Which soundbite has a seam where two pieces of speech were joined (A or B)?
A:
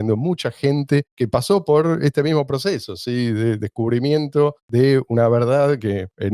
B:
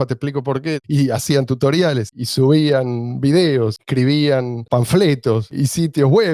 B